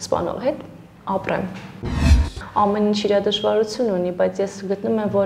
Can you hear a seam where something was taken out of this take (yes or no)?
yes